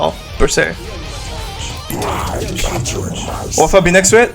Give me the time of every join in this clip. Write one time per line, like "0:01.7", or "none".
0:01.9